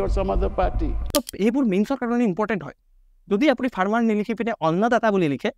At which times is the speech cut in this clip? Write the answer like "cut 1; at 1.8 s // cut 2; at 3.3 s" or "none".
cut 1; at 0.9 s